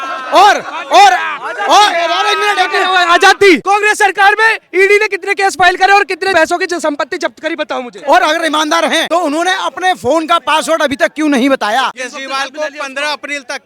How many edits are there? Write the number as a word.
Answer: five